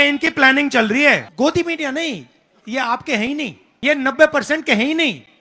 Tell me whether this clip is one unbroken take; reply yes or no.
no